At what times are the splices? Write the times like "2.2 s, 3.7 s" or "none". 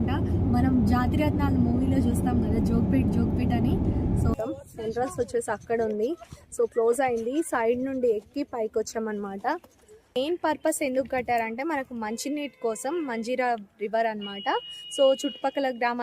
4.3 s, 10.2 s

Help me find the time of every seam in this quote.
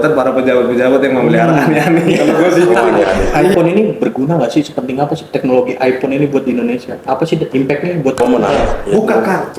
3.4 s, 8.2 s

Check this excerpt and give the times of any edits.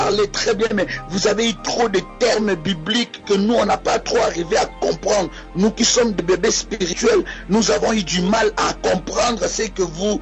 4.1 s

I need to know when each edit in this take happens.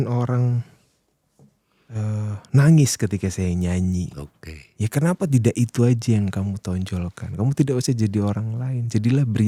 none

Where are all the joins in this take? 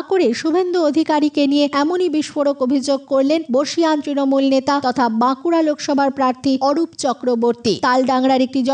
1.7 s, 3.5 s, 4.8 s, 6.6 s, 7.8 s

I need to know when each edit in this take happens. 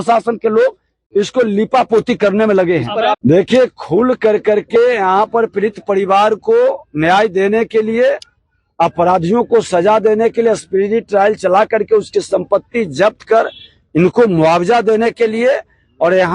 3.2 s

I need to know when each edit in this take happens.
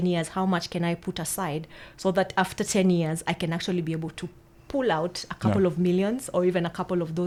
none

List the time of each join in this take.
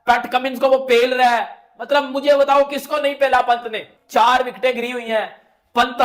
none

